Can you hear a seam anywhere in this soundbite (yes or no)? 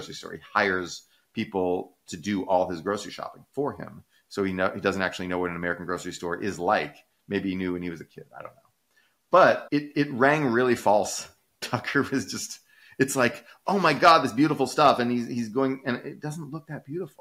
no